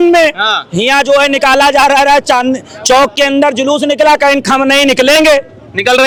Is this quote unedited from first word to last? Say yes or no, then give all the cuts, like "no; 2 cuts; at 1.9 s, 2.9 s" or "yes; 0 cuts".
yes; 0 cuts